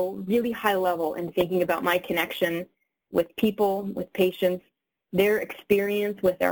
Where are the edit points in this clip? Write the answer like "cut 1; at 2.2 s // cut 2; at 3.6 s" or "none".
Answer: none